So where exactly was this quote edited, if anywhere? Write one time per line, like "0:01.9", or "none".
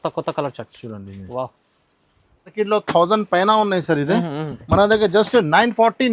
0:02.5